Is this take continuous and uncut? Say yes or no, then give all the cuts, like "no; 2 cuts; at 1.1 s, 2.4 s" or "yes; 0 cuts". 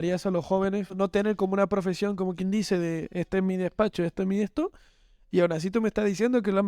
no; 1 cut; at 0.9 s